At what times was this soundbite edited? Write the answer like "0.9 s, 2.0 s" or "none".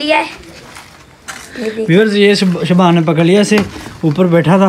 none